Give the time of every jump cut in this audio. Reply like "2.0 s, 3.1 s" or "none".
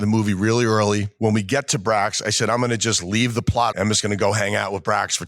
1.1 s, 3.7 s